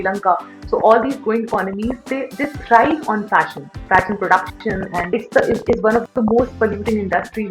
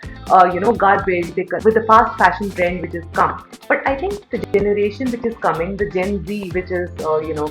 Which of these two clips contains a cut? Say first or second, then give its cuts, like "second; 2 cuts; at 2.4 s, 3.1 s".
second; 1 cut; at 1.5 s